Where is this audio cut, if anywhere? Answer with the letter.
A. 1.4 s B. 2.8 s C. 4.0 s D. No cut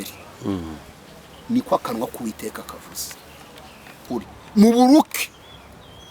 C